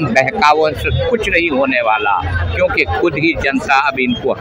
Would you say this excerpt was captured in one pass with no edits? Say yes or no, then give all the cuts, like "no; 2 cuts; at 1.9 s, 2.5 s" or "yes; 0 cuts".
yes; 0 cuts